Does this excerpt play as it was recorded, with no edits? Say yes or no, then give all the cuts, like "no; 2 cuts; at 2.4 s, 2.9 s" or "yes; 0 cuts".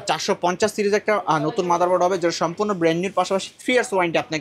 yes; 0 cuts